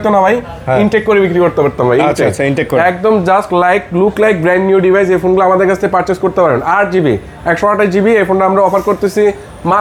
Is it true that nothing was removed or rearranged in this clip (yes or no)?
yes